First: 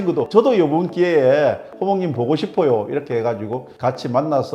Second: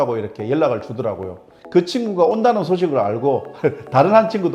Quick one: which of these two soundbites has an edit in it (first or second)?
second